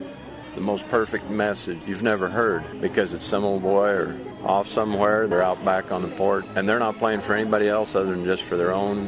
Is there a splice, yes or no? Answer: yes